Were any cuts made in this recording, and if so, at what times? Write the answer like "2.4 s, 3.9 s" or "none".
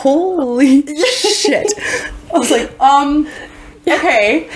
none